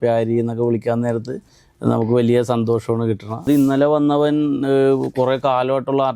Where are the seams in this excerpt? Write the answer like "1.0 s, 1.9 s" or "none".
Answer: 3.4 s